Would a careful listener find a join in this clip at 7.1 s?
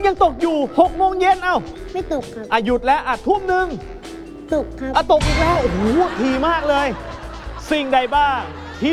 yes; 2 cuts; at 1.8 s, 7.1 s

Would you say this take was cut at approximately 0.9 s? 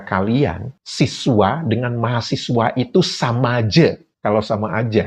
no; 1 cut; at 4.1 s

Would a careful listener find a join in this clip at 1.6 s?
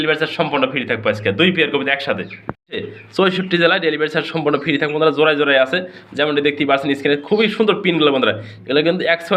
no; 1 cut; at 3.0 s

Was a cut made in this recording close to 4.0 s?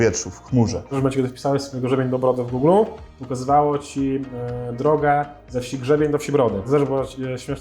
no; 2 cuts; at 0.9 s, 6.7 s

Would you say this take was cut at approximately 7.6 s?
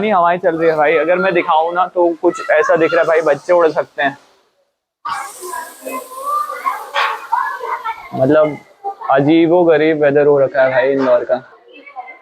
no; 0 cuts

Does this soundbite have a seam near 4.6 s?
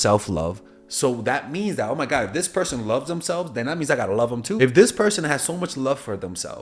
yes; 1 cut; at 4.6 s

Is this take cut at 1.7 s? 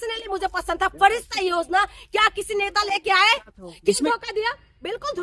no; 1 cut; at 4.0 s

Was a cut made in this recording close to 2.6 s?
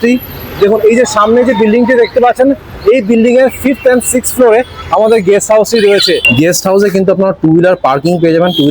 no; 1 cut; at 6.3 s

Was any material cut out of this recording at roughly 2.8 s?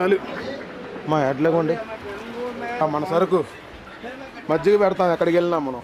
yes; 1 cut; at 2.8 s

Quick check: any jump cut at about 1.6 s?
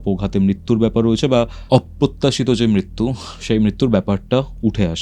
yes; 1 cut; at 1.6 s

